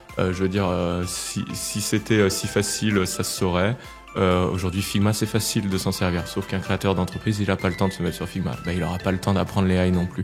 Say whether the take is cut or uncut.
uncut